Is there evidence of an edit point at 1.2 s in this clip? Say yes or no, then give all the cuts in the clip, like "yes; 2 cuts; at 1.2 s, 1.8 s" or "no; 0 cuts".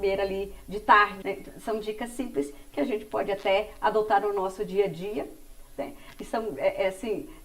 yes; 1 cut; at 1.2 s